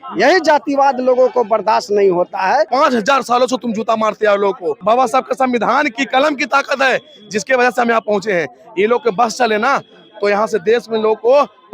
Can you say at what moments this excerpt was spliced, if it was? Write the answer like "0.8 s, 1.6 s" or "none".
2.7 s, 4.8 s